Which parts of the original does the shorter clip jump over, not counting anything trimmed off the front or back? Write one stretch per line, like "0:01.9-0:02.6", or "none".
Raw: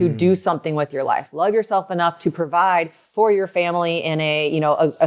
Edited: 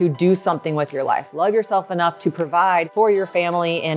0:02.9-0:03.1